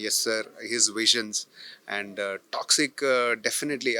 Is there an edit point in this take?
no; 0 cuts

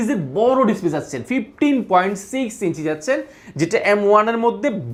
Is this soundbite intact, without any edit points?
yes; 0 cuts

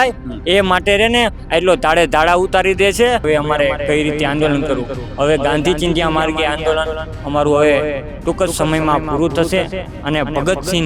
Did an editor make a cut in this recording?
yes; 1 cut; at 3.2 s

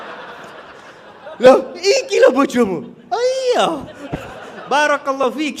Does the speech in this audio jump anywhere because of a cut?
no; 0 cuts

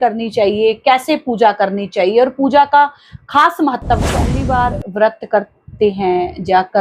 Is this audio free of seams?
no; 1 cut; at 4.4 s

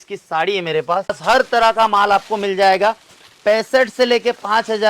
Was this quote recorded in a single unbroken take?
no; 1 cut; at 1.2 s

